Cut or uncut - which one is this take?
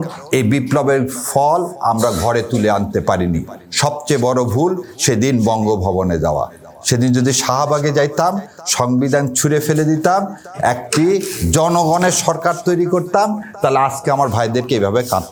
uncut